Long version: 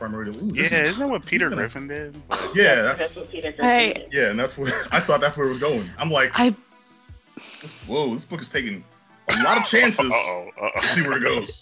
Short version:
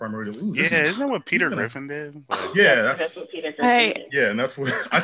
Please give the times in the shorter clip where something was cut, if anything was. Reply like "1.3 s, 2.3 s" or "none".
none

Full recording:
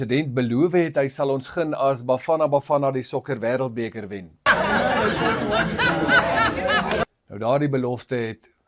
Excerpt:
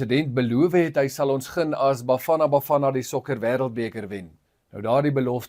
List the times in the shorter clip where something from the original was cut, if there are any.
4.5 s

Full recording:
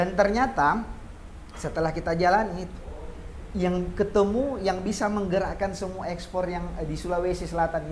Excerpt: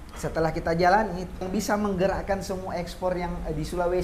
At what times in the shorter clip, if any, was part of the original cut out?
1.5 s

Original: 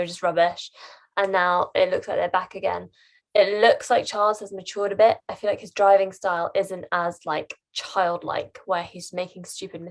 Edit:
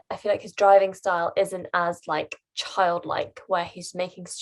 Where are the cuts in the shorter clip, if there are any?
none

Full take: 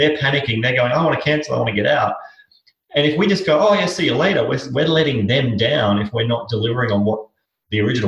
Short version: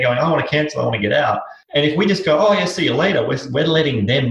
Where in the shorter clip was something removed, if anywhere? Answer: 1.5 s

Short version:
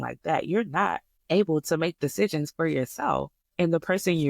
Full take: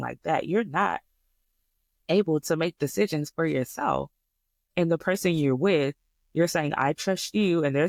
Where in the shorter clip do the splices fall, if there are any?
1.1 s, 3.4 s

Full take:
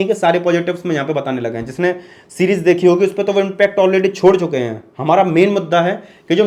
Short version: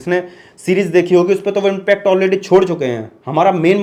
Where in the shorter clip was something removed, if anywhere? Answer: none

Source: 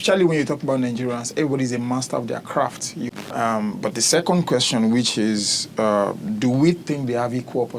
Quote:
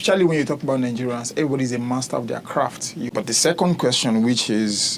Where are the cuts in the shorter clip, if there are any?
3.1 s

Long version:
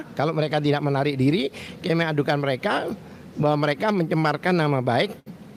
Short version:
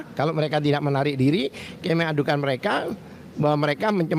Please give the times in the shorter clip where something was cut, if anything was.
none

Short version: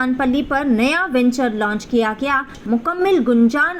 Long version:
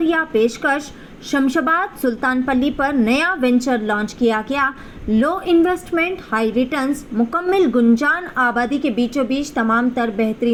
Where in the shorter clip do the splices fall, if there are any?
2.6 s

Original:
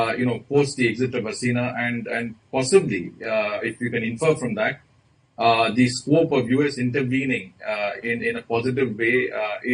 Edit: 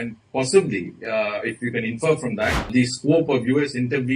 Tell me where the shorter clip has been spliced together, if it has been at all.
2.7 s

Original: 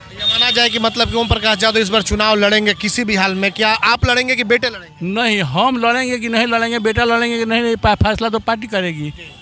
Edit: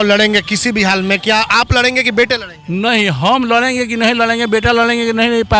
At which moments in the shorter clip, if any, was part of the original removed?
none

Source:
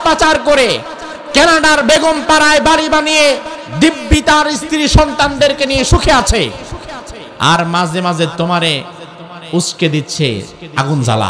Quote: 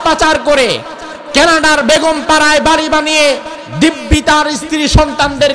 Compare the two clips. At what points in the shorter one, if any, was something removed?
none

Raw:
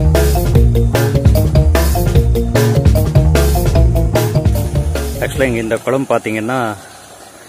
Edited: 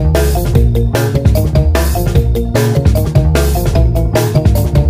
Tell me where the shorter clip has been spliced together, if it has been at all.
none

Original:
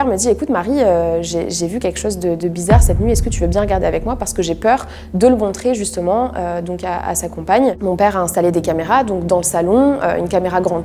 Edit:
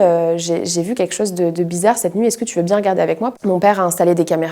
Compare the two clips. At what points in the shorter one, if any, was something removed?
3.4 s

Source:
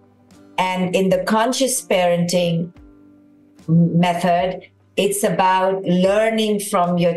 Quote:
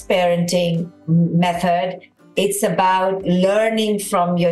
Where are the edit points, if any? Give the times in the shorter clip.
0.9 s

